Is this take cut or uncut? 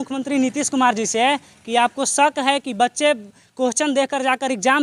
uncut